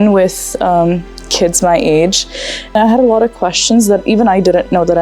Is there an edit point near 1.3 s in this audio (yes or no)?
no